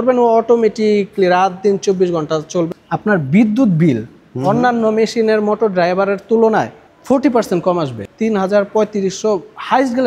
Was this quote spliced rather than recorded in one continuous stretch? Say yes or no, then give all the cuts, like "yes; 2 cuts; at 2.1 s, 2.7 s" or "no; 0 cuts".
yes; 2 cuts; at 2.8 s, 8.1 s